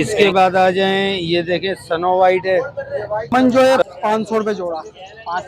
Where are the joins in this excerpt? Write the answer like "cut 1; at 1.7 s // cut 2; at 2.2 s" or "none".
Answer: cut 1; at 3.3 s

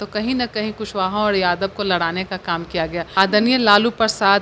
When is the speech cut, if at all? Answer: cut 1; at 3.0 s

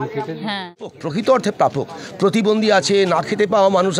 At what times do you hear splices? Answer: cut 1; at 1.0 s

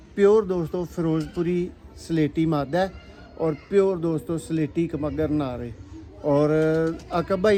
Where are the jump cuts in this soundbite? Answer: none

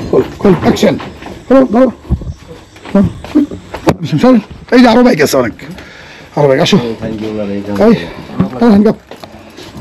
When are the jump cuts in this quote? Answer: none

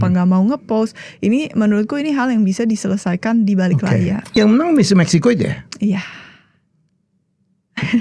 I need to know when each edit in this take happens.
cut 1; at 4.3 s

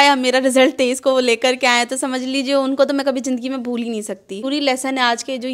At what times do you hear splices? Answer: cut 1; at 4.5 s

